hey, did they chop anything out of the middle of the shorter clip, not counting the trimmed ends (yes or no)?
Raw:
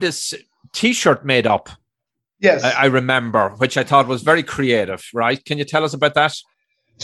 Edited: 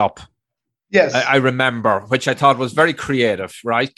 no